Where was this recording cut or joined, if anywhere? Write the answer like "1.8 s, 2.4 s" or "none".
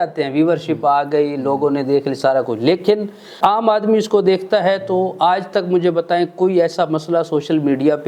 3.3 s

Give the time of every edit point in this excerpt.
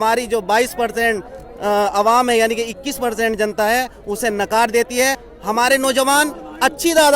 5.2 s

